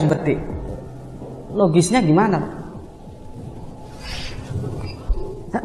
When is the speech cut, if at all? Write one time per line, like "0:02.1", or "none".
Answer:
0:03.2